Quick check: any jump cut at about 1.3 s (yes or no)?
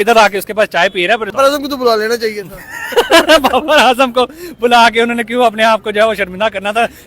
yes